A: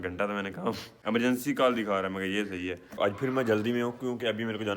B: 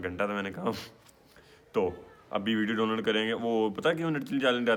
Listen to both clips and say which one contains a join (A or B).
A